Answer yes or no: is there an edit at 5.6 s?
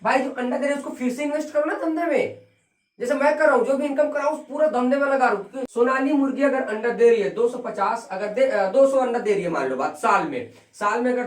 yes